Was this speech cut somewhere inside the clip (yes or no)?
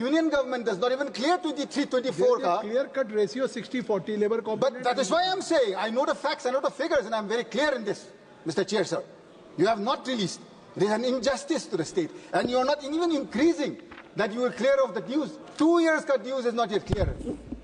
yes